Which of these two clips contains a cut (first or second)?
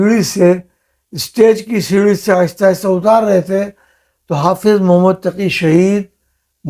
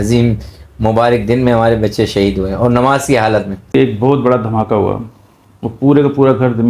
second